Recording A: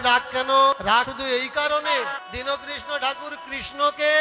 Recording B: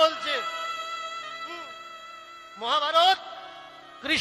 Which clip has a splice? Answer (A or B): A